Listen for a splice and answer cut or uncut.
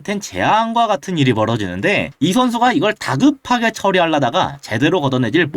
uncut